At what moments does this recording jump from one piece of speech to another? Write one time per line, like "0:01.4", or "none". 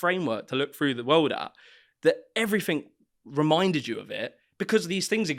none